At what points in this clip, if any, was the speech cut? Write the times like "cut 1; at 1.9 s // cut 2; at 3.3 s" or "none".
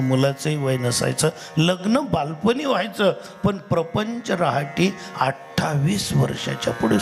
none